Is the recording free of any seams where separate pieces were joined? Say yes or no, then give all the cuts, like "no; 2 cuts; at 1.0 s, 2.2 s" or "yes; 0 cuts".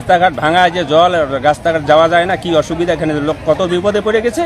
yes; 0 cuts